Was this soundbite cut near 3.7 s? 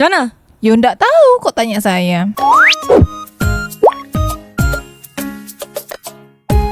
no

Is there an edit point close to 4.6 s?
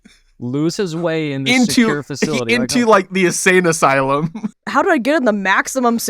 yes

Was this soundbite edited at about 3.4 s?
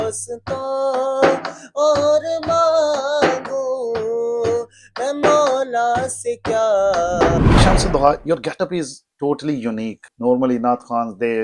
no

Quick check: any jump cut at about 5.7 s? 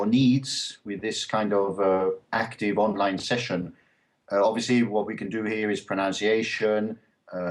no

